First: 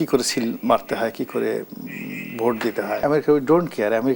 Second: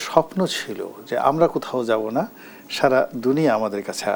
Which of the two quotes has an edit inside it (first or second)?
first